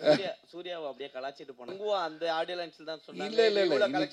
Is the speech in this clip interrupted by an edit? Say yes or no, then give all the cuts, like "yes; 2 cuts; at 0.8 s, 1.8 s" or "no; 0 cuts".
yes; 1 cut; at 1.8 s